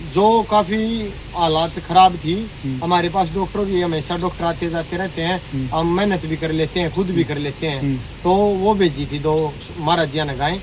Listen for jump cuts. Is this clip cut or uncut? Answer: uncut